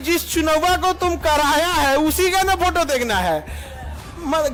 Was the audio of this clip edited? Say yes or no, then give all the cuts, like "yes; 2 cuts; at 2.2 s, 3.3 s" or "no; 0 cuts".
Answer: no; 0 cuts